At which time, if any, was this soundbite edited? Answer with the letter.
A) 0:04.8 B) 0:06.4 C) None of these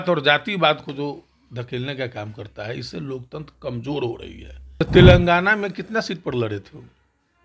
A